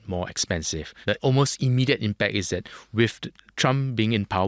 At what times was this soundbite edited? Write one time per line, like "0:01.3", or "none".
0:01.0